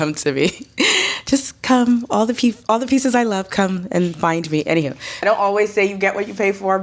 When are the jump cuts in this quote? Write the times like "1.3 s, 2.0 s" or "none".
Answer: 5.1 s